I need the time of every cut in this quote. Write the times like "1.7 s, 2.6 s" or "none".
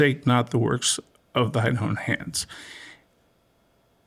none